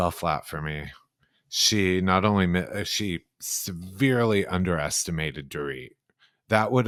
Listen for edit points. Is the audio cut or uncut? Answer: uncut